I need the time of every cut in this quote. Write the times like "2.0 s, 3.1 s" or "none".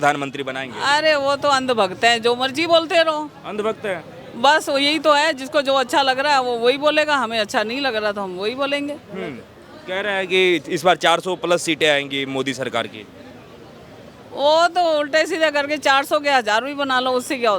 none